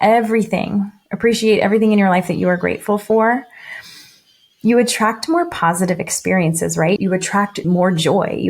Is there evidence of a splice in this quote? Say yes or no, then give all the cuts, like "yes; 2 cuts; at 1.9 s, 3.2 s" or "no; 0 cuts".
yes; 1 cut; at 7.6 s